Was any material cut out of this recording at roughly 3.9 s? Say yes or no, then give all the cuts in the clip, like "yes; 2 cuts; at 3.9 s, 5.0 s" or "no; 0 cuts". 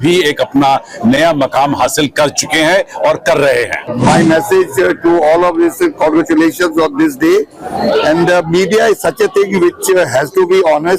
yes; 1 cut; at 3.9 s